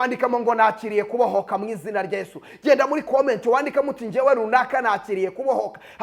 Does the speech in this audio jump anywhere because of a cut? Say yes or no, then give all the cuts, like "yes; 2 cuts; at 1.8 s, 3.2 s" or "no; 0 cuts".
no; 0 cuts